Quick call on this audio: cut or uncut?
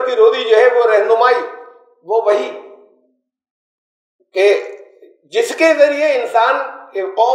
uncut